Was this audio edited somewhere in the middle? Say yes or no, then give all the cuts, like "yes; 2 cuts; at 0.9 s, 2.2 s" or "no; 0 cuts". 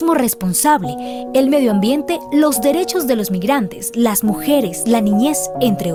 no; 0 cuts